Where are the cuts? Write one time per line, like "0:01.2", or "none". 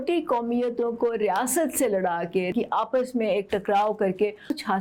0:02.5